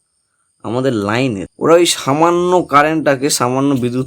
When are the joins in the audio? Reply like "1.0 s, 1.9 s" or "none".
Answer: 1.5 s